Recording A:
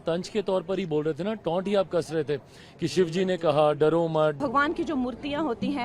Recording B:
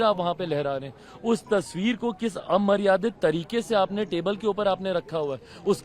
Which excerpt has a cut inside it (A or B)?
A